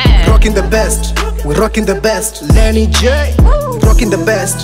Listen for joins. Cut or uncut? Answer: uncut